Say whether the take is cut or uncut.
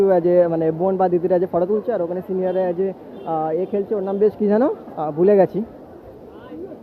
uncut